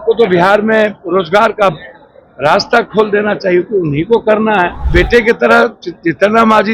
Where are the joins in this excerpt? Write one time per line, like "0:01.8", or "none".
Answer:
0:04.8